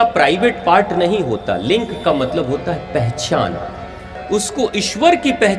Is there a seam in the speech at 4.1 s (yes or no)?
yes